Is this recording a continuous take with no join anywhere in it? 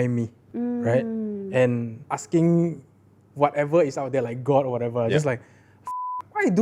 no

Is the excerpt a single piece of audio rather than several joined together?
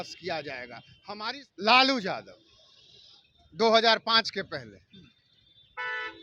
no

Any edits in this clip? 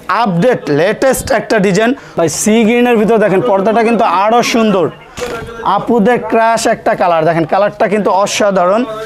yes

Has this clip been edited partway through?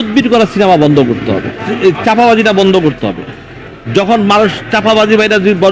yes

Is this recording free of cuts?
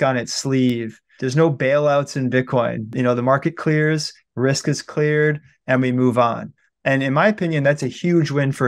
no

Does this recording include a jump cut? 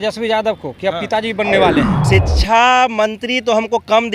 yes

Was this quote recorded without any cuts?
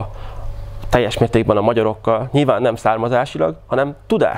yes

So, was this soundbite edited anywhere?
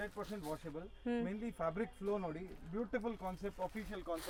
no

